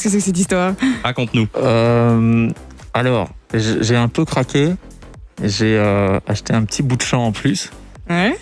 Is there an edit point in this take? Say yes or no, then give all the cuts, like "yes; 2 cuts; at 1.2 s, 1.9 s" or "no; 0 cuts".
no; 0 cuts